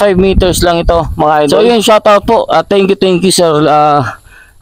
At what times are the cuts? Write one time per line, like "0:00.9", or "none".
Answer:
0:01.6